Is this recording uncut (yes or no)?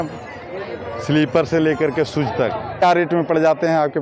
no